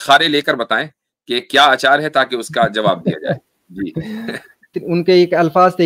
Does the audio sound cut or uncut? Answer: cut